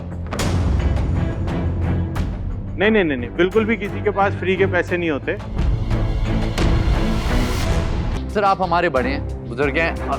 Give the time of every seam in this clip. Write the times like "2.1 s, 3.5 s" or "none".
8.2 s